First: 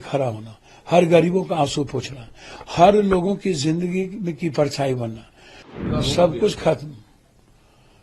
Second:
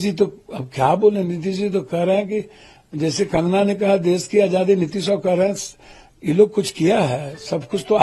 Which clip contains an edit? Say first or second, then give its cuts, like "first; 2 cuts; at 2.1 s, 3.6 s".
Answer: first; 1 cut; at 5.8 s